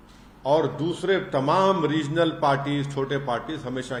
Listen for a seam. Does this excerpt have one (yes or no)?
no